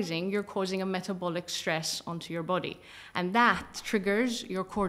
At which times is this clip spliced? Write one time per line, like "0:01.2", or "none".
none